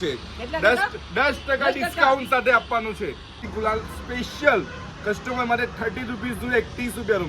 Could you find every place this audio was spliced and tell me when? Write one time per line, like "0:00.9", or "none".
0:03.4